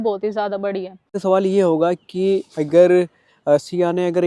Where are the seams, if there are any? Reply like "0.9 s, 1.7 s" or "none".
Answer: 1.1 s